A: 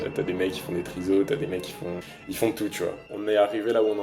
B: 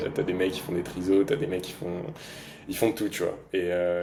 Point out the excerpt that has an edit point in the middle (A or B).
A